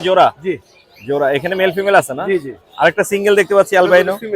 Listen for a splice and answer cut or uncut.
uncut